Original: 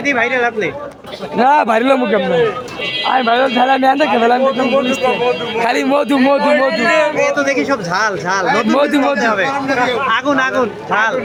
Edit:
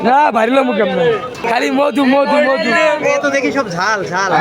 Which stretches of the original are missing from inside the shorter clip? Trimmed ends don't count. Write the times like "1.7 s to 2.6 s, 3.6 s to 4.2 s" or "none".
2.7 s to 5.5 s